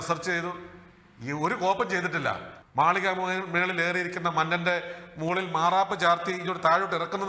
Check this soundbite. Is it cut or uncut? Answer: cut